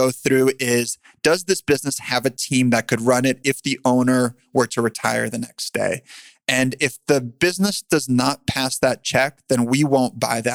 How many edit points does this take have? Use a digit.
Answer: 0